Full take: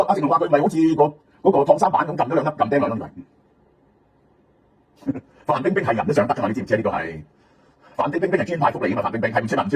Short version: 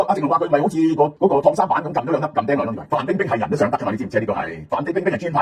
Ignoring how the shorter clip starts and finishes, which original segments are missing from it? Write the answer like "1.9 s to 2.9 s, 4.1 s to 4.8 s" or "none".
1.1 s to 1.4 s, 3.0 s to 5.4 s, 7.1 s to 7.8 s